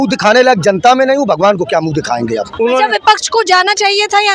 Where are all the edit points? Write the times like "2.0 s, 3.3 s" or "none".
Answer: 2.5 s